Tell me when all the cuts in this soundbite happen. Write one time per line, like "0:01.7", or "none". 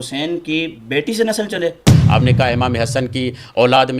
0:01.9